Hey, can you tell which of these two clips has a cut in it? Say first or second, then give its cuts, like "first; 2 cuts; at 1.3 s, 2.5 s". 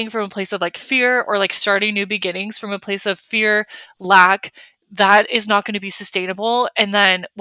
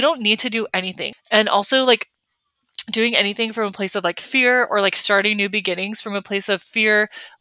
second; 1 cut; at 1.0 s